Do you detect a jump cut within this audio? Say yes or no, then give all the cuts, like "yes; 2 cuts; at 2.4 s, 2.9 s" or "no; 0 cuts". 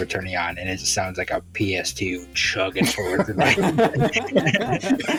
no; 0 cuts